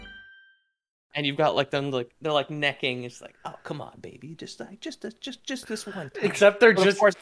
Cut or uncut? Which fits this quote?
cut